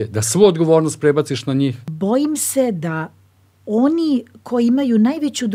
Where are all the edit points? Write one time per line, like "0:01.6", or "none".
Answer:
0:01.9